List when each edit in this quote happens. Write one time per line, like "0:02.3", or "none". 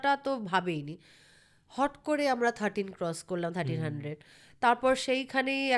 none